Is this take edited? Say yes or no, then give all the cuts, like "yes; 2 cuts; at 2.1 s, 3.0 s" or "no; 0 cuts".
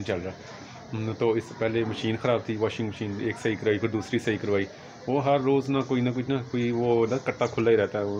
no; 0 cuts